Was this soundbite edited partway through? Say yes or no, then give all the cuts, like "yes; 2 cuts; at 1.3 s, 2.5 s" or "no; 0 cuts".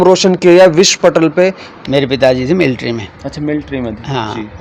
yes; 1 cut; at 1.7 s